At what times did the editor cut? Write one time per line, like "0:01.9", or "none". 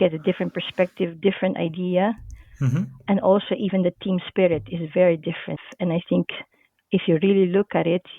0:05.6